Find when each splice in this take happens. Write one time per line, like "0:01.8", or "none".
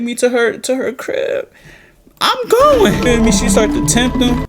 0:03.1